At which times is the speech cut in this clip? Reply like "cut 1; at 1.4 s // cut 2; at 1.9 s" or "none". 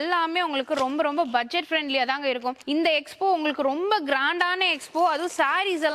cut 1; at 2.6 s